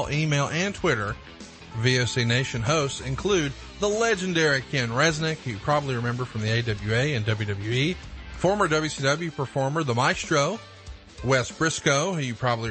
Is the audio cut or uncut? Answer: uncut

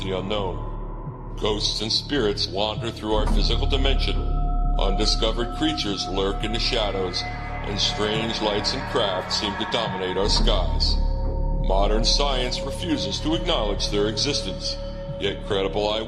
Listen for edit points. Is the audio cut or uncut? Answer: uncut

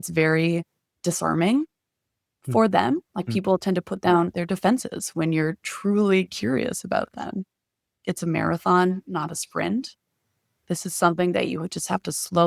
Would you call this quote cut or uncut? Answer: cut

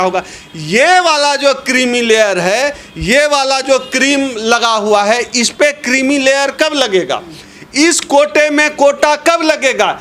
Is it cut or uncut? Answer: uncut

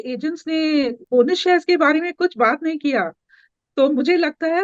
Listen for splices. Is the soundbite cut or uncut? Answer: cut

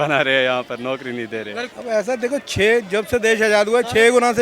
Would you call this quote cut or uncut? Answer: cut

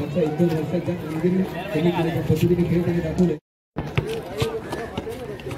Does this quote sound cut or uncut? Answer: cut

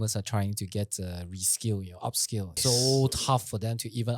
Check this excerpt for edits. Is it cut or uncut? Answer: cut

